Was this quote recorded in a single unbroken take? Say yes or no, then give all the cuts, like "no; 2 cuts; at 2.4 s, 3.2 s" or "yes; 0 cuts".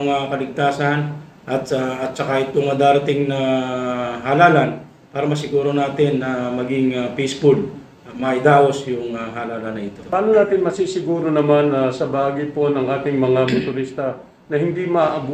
no; 1 cut; at 10.0 s